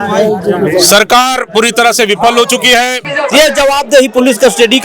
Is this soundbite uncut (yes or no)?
no